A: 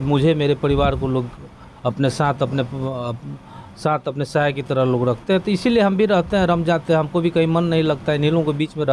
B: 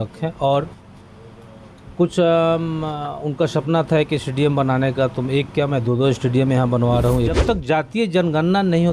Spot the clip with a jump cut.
B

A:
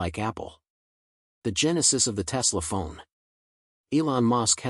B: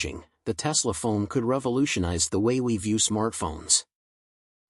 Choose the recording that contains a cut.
A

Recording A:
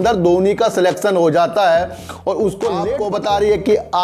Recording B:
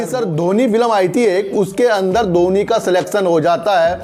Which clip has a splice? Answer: A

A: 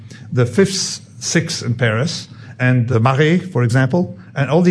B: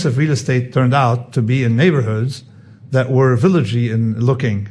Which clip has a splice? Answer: A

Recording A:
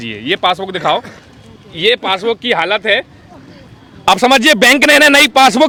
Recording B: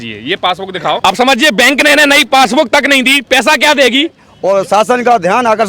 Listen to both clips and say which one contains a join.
B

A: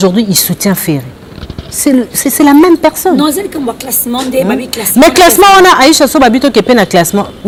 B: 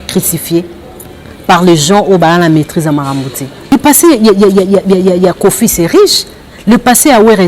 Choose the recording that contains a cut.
B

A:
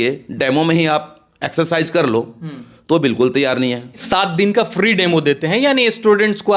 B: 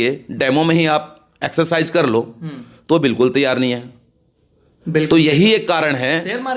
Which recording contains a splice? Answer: A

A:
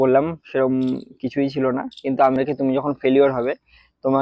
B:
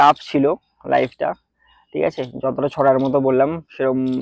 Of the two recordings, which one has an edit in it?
A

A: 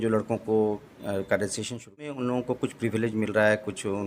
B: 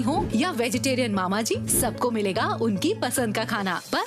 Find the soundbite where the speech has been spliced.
A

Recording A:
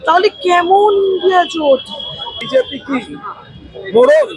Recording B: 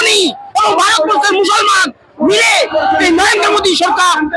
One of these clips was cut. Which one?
A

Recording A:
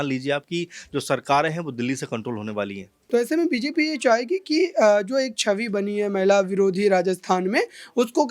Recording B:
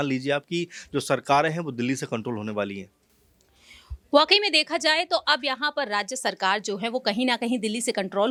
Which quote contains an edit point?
A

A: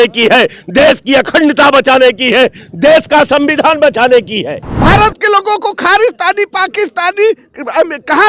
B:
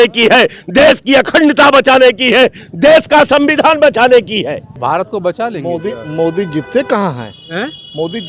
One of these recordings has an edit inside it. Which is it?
A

